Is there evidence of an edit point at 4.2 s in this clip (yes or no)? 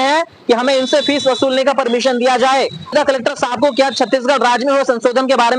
no